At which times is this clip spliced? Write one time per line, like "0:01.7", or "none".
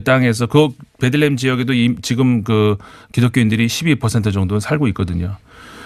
none

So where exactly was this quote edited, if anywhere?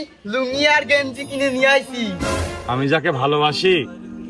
0:02.5

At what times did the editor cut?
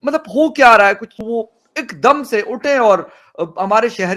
0:01.2

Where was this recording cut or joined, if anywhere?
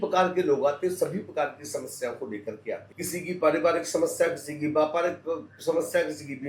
0:02.9

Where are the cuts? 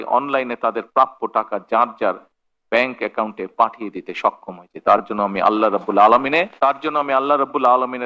0:06.5

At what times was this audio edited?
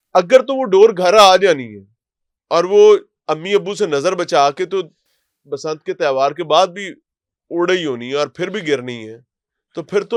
none

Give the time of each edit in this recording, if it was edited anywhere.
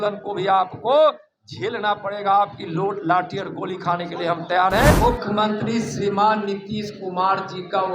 0:04.9

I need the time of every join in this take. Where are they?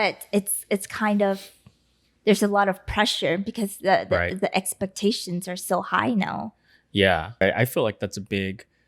0:07.4

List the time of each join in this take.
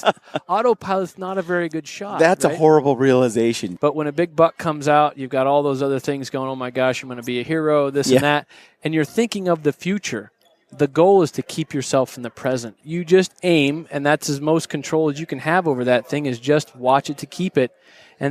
0:03.7
0:12.8

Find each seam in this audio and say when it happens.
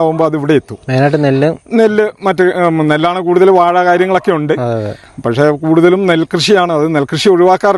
none

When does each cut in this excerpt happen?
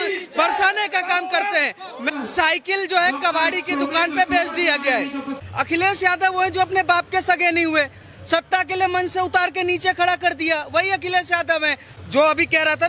0:02.0
0:05.3
0:11.9

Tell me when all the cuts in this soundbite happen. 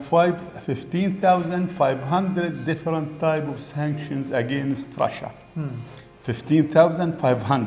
none

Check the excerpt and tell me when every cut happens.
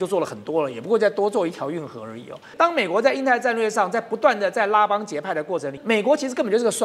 0:02.5
0:05.8

